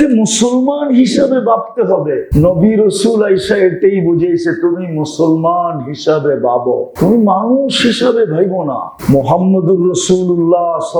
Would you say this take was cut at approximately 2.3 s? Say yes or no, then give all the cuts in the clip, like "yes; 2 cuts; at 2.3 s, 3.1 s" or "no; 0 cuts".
yes; 3 cuts; at 2.3 s, 6.9 s, 8.9 s